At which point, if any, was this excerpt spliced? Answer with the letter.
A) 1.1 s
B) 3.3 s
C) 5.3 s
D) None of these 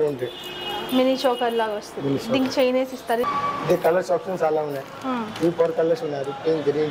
B